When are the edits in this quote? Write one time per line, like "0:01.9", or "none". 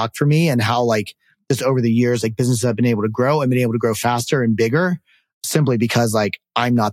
none